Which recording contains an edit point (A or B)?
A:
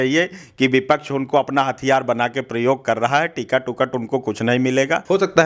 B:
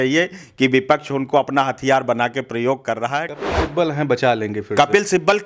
B